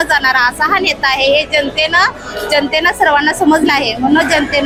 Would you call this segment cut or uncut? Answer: uncut